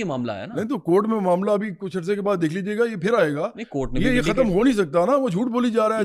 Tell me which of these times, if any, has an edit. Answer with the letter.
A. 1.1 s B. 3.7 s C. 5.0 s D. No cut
D